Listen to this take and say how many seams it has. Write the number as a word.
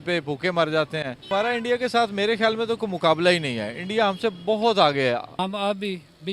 two